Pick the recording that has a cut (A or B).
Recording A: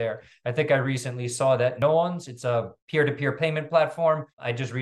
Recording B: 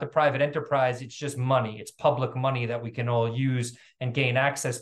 A